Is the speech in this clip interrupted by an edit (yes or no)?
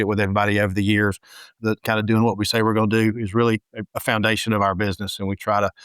yes